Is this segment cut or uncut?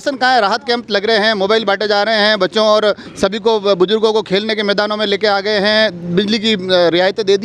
uncut